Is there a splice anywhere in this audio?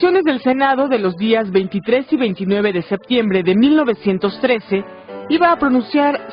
yes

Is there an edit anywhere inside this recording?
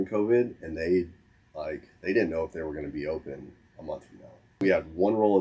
yes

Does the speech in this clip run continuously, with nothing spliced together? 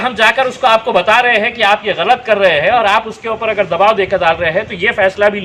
yes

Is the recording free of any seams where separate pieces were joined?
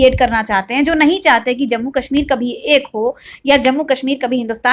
yes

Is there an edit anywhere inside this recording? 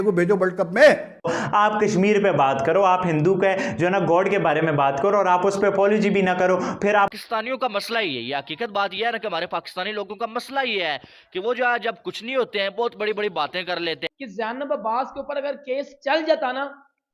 yes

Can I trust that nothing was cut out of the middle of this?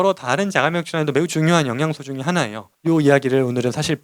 no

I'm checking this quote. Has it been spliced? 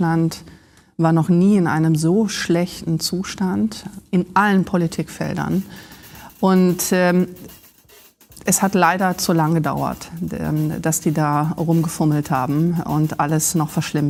no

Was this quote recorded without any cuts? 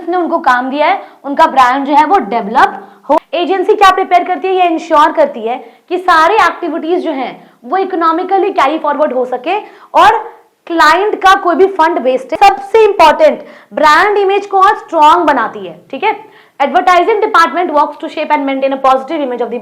no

